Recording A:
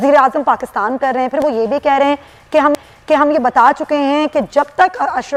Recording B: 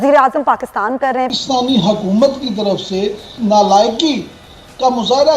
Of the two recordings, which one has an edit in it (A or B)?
B